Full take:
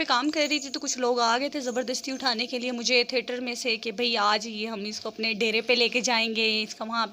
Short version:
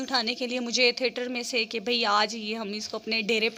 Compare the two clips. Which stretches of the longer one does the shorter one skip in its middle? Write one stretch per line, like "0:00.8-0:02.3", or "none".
none